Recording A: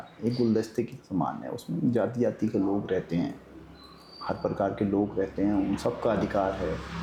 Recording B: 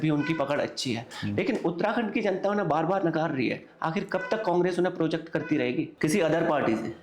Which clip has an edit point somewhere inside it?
B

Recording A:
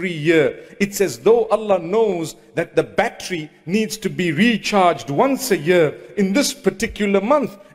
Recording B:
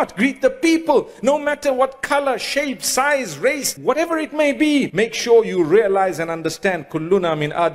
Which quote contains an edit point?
B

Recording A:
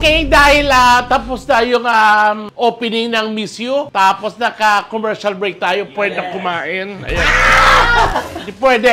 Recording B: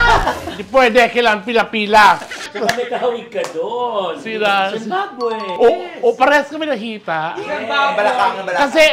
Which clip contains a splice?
B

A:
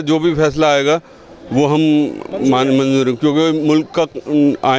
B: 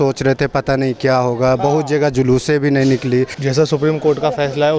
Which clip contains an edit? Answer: B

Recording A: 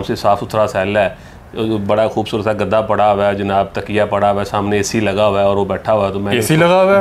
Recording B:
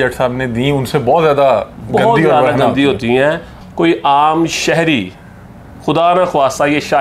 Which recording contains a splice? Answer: B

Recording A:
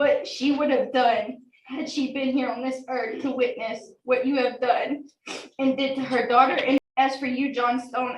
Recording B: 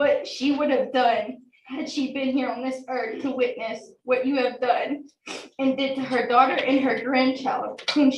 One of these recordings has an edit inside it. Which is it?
A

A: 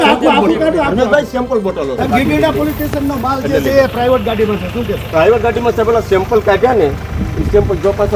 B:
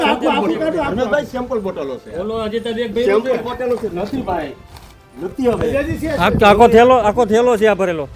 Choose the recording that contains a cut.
A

